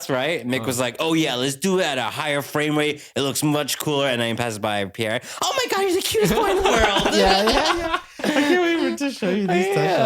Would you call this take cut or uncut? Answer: uncut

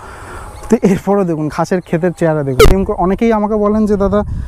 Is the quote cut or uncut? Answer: cut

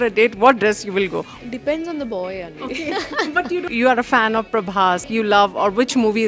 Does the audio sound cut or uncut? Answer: cut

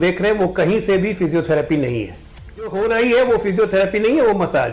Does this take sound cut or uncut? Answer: cut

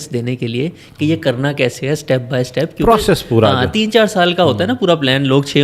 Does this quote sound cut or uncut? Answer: uncut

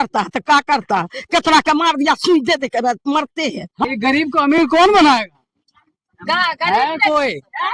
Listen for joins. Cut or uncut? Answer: cut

